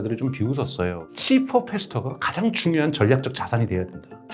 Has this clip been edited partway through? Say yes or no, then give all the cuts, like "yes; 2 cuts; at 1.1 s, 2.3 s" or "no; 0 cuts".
yes; 1 cut; at 1.0 s